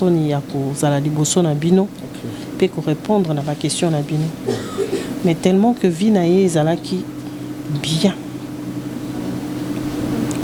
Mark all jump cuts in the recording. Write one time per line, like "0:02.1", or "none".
none